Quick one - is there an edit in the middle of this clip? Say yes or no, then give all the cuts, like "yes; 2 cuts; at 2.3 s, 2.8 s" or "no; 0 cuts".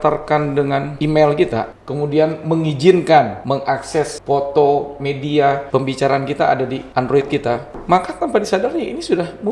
yes; 5 cuts; at 0.9 s, 1.8 s, 3.7 s, 5.6 s, 7.4 s